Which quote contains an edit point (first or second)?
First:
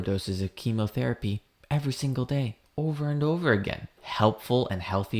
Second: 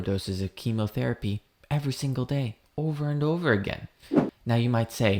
first